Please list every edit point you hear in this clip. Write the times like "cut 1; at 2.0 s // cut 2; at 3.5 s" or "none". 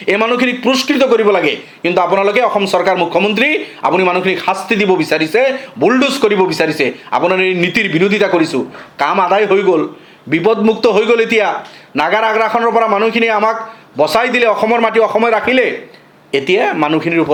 none